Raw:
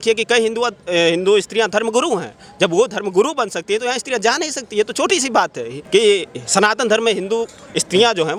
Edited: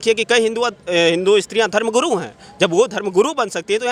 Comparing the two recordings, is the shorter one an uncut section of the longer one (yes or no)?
yes